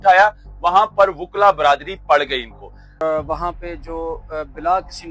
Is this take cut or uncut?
cut